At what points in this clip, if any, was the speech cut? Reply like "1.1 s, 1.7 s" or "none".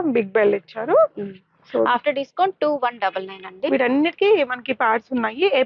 none